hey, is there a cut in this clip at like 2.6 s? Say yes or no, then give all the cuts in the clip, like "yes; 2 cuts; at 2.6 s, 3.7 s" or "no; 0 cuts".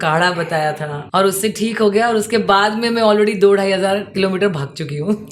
no; 1 cut; at 0.9 s